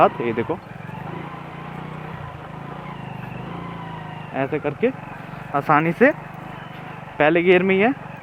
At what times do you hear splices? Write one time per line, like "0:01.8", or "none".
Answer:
none